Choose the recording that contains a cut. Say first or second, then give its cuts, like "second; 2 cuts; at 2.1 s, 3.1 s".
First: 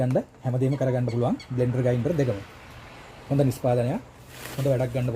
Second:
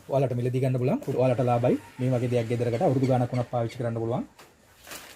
second; 1 cut; at 1.1 s